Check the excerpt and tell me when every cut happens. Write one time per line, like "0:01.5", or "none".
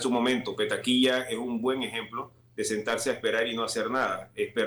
none